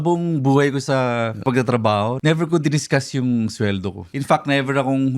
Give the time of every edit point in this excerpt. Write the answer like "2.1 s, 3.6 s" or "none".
1.4 s, 2.2 s, 4.1 s